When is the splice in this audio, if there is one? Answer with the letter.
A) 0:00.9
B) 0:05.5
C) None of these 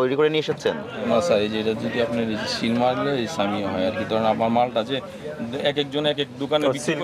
A